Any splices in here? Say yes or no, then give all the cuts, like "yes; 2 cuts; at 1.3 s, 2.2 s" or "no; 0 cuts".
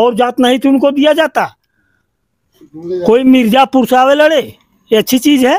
no; 0 cuts